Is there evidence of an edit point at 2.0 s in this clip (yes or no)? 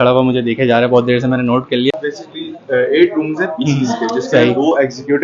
yes